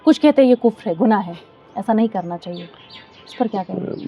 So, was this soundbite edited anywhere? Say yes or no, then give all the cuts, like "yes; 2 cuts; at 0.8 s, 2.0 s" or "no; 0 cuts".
no; 0 cuts